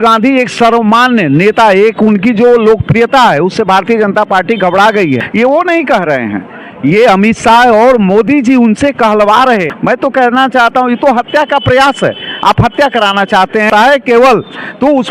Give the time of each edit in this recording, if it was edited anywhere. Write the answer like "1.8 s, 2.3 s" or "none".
5.3 s, 9.7 s, 13.7 s